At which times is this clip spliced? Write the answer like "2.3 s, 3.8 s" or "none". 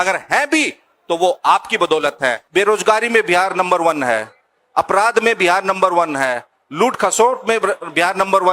2.4 s